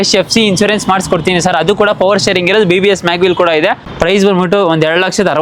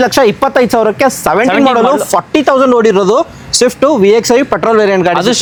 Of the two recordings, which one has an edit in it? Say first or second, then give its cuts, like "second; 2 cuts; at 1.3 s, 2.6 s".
first; 1 cut; at 3.9 s